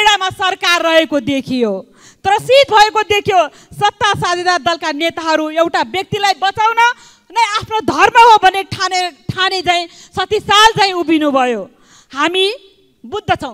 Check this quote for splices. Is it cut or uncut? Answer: uncut